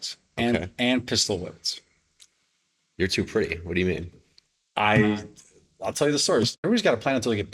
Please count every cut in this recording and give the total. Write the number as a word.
one